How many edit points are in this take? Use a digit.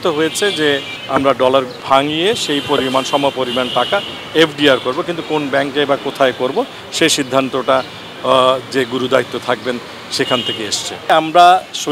3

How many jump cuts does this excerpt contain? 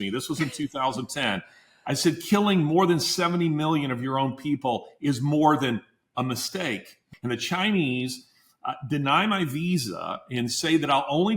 1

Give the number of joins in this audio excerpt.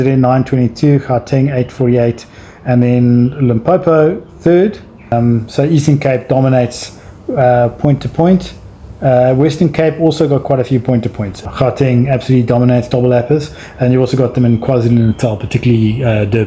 2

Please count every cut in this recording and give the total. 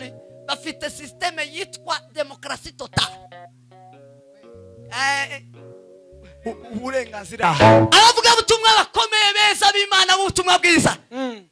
1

